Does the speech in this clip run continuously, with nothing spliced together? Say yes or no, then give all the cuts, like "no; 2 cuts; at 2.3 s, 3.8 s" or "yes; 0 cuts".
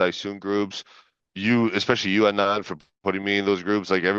yes; 0 cuts